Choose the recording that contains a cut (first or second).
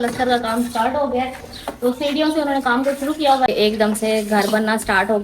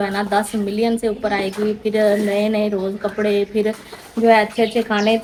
first